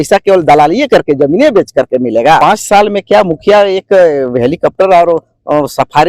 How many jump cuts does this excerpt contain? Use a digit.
1